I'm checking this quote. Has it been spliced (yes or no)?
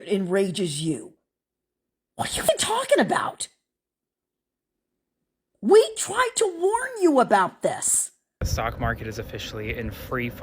yes